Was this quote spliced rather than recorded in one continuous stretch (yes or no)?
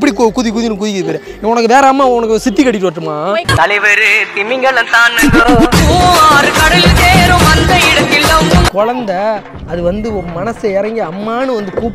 yes